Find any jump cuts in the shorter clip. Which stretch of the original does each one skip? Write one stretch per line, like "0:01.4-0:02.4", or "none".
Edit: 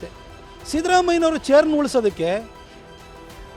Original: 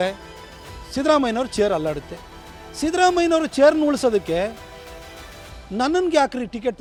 none